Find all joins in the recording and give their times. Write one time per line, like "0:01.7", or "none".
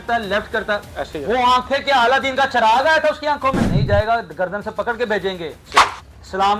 0:03.7